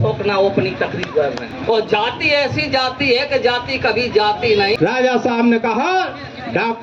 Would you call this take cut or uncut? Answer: cut